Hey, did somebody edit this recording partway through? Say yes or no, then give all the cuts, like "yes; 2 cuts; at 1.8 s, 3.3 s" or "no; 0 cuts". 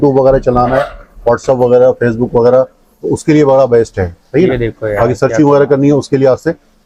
no; 0 cuts